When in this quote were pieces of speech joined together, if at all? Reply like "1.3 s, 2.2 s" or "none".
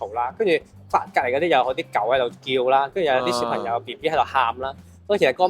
none